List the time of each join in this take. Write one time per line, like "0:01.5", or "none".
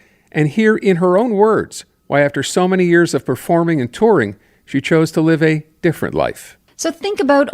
0:06.5